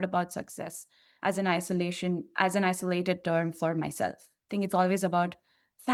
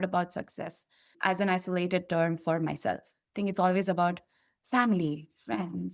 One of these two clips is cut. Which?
second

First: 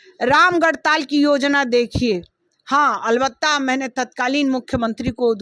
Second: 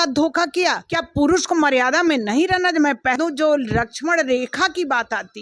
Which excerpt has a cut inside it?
second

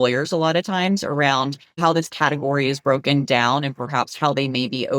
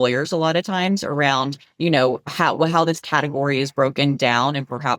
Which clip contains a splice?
first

